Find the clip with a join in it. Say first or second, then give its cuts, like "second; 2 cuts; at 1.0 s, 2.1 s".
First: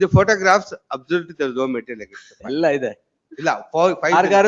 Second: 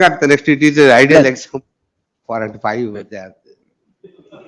second; 1 cut; at 1.5 s